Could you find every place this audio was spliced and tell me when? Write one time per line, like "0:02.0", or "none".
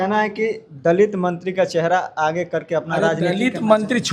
none